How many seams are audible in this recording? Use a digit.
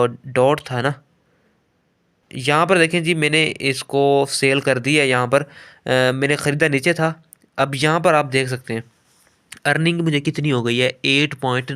1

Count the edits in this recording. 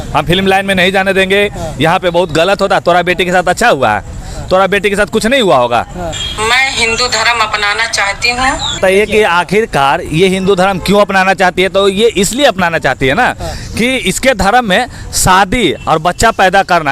2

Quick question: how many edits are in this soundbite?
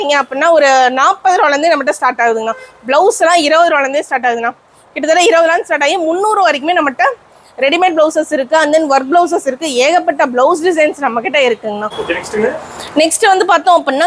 1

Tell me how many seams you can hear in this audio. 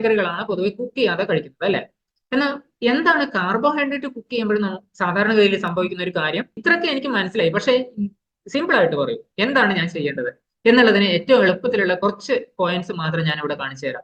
1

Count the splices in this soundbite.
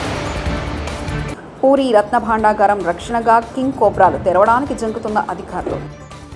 1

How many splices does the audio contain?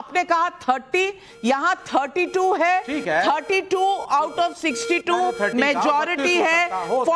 1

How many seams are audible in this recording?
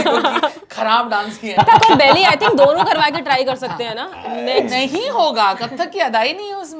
1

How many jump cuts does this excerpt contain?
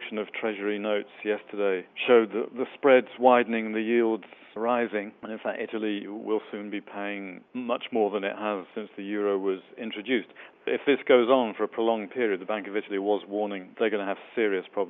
2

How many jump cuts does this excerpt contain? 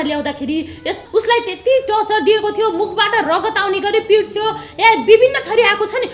1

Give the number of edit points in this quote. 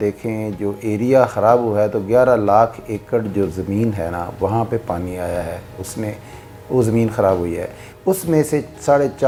0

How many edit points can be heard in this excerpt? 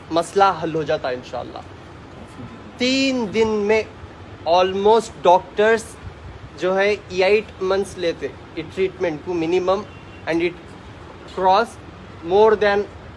0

